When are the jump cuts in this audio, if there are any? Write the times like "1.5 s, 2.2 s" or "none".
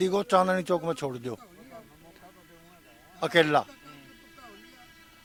none